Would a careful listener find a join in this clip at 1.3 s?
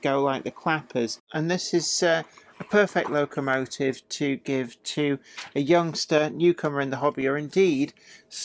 yes; 1 cut; at 1.3 s

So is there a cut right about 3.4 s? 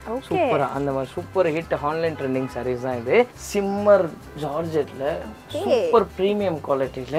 yes; 1 cut; at 3.4 s

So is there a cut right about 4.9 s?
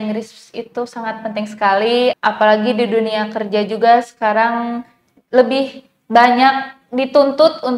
no; 1 cut; at 2.1 s

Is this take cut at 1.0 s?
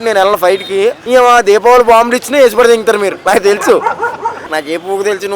yes; 2 cuts; at 1.0 s, 4.5 s

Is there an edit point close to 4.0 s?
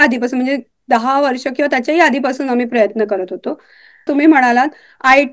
yes; 1 cut; at 4.0 s

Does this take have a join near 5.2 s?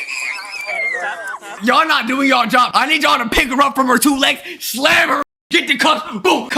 yes; 2 cuts; at 1.5 s, 5.2 s

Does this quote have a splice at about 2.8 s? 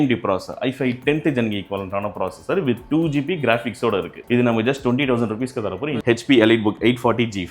no; 1 cut; at 6.0 s

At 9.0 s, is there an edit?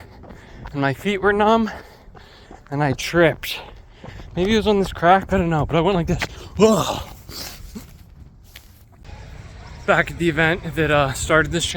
yes; 1 cut; at 9.0 s

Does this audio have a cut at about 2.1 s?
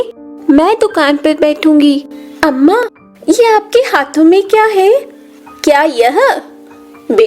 yes; 1 cut; at 2.1 s

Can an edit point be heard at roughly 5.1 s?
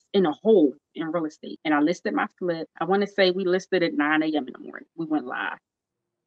no; 2 cuts; at 1.5 s, 2.7 s

